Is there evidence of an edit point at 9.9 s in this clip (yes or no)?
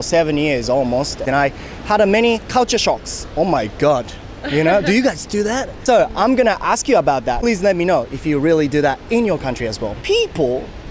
yes